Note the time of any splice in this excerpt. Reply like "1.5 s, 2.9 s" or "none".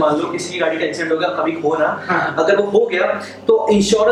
none